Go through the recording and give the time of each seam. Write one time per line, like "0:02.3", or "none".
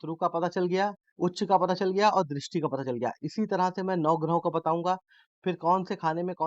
0:01.0